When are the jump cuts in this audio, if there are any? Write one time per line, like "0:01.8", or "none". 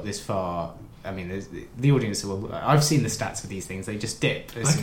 none